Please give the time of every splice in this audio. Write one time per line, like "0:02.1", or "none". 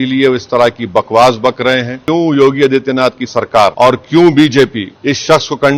0:02.0
0:03.7
0:04.9